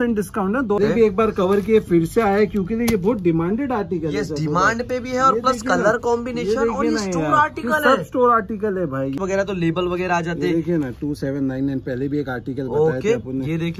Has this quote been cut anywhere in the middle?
yes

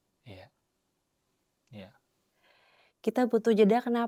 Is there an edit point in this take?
no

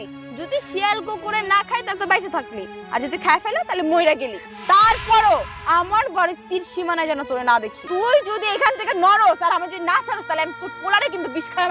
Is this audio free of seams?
no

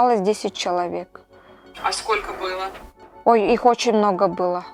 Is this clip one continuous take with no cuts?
yes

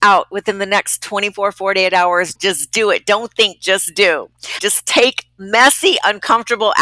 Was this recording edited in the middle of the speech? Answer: yes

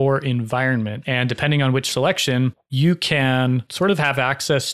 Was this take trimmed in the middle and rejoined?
yes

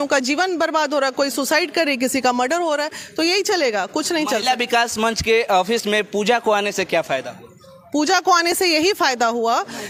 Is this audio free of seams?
yes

